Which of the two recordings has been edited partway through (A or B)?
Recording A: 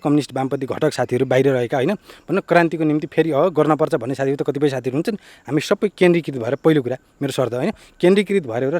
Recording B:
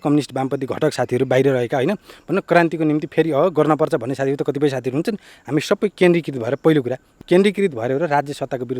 B